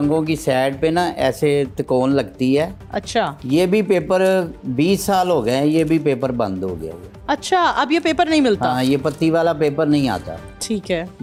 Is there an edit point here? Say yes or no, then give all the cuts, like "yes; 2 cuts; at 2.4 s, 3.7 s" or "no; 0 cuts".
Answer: no; 0 cuts